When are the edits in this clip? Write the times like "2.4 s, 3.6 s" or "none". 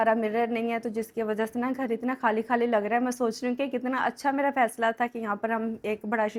none